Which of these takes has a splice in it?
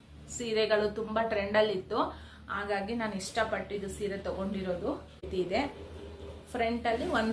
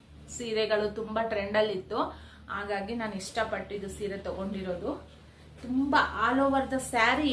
first; 1 cut; at 5.3 s

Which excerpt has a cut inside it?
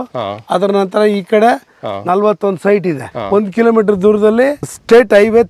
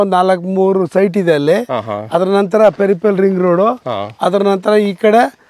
first; 1 cut; at 3.1 s

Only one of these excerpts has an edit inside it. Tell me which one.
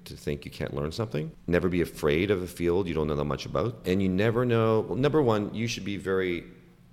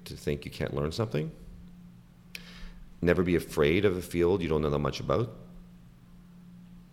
first; 2 cuts; at 1.4 s, 3.8 s

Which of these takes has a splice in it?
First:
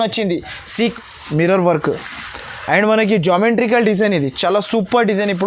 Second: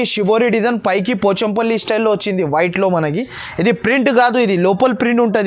first; 1 cut; at 0.9 s

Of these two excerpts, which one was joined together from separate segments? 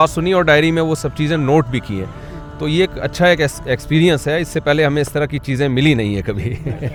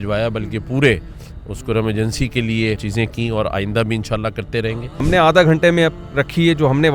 second; 2 cuts; at 2.8 s, 5.0 s

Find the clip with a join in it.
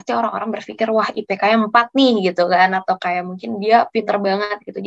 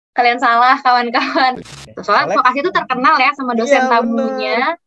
second; 1 cut; at 1.6 s

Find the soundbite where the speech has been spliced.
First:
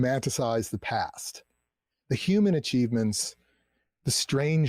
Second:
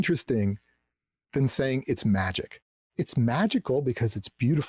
second; 2 cuts; at 1.3 s, 2.6 s

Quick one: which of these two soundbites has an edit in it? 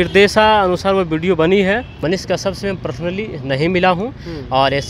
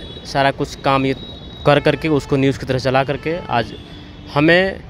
first; 1 cut; at 1.9 s

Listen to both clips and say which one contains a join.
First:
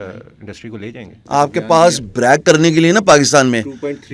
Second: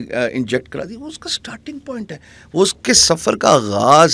first; 1 cut; at 1.2 s

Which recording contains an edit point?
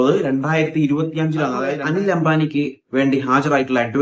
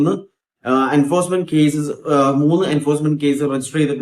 first; 1 cut; at 1.7 s

